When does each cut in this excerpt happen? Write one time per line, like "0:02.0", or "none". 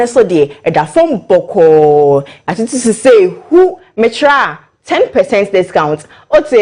none